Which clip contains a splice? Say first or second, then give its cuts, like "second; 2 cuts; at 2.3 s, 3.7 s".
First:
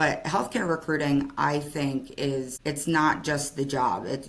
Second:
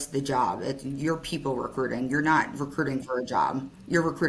first; 1 cut; at 2.5 s